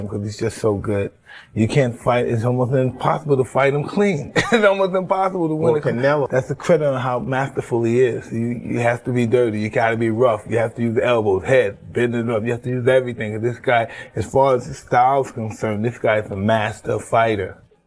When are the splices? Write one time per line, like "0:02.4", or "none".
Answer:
0:16.8